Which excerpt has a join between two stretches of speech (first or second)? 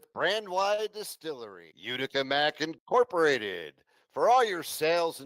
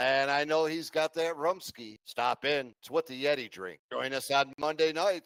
first